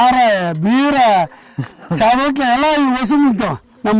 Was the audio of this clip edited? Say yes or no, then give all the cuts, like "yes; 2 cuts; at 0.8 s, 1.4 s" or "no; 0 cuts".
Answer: no; 0 cuts